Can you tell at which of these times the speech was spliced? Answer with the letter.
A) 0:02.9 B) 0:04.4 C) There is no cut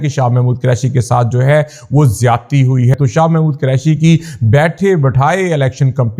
A